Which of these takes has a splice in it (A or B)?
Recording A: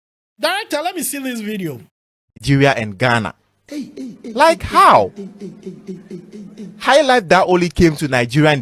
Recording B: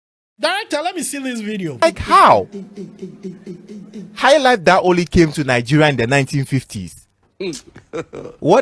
B